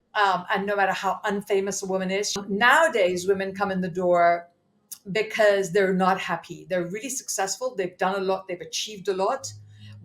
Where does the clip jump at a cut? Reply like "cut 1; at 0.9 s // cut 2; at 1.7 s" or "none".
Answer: cut 1; at 2.4 s